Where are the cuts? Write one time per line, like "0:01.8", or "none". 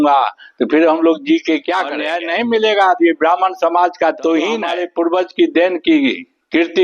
0:02.1
0:04.8